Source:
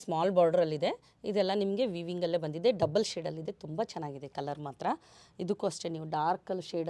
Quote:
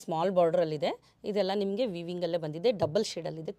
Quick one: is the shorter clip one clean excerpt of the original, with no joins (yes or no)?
yes